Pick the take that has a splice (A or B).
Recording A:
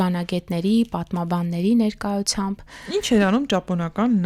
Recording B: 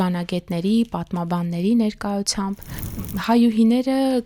B